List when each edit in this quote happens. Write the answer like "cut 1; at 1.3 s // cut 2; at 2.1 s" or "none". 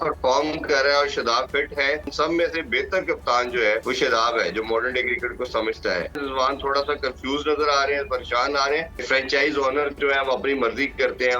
cut 1; at 2.1 s // cut 2; at 3.8 s // cut 3; at 6.2 s // cut 4; at 9.0 s